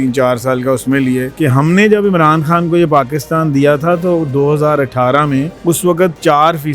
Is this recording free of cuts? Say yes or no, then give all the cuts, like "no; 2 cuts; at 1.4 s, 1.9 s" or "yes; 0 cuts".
no; 2 cuts; at 1.3 s, 5.5 s